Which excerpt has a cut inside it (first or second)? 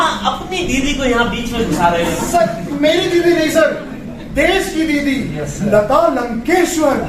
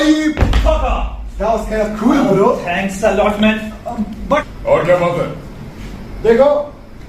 second